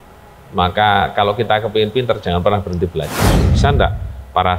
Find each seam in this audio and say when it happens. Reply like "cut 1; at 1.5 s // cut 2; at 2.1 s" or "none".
cut 1; at 3.3 s